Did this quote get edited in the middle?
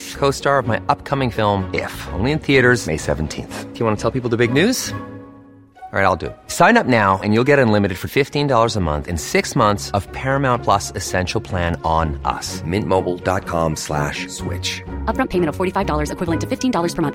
no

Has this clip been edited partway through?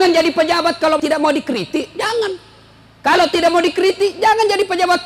yes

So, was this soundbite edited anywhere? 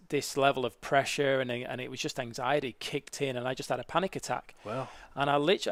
no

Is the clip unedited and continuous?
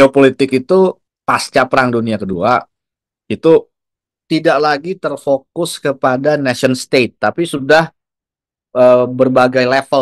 no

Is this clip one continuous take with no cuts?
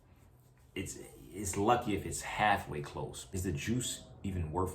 no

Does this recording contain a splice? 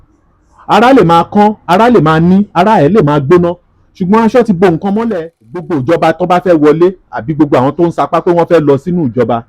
yes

